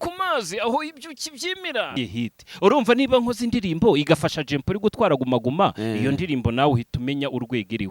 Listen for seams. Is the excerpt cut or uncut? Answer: cut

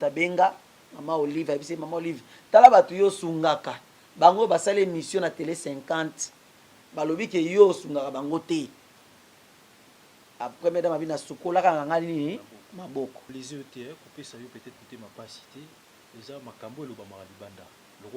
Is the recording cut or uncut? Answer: cut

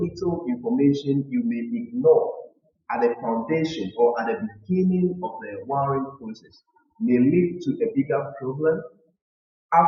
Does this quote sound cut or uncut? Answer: uncut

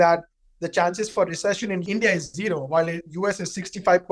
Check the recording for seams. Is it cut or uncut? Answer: cut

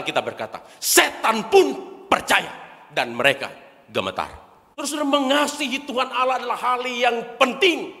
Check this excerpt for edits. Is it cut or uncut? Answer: cut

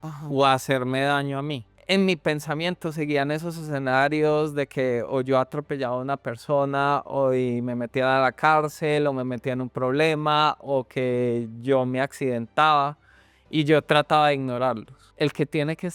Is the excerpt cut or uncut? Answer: cut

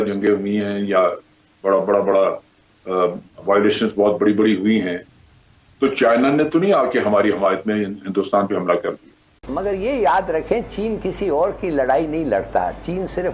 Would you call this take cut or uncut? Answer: cut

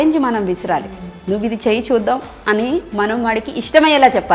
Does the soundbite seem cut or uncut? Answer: uncut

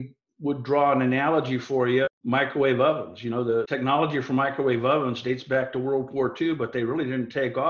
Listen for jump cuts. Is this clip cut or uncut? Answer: cut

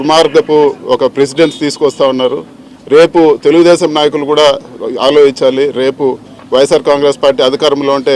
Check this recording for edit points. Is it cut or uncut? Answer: uncut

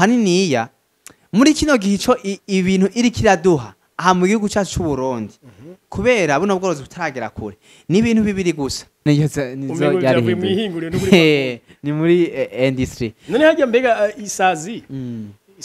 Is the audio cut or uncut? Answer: cut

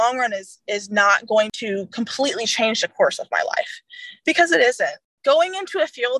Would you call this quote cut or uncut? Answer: cut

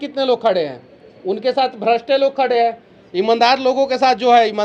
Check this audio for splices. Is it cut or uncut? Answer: uncut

